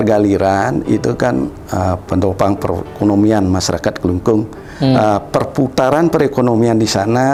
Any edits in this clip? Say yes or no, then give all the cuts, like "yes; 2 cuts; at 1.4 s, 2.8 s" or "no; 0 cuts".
no; 0 cuts